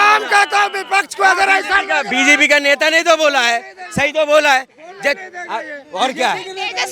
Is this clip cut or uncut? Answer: uncut